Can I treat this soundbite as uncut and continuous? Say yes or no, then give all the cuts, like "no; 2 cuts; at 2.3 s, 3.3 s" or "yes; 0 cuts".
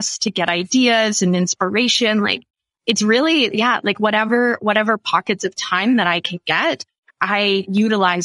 yes; 0 cuts